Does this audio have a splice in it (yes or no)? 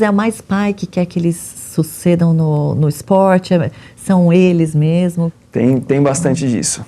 yes